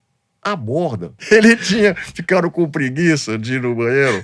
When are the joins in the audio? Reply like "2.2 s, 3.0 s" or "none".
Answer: 1.1 s